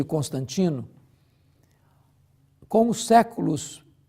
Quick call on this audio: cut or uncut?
cut